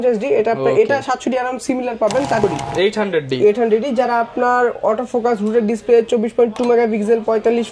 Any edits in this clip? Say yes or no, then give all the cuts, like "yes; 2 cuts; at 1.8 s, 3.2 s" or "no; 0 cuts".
yes; 1 cut; at 2.4 s